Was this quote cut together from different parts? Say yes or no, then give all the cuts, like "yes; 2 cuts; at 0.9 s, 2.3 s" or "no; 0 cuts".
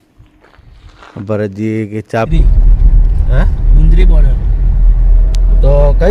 yes; 1 cut; at 2.3 s